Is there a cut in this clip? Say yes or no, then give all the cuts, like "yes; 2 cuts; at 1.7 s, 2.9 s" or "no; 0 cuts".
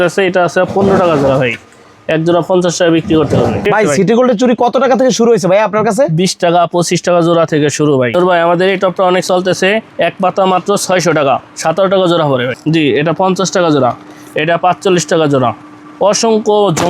yes; 3 cuts; at 3.6 s, 8.1 s, 12.6 s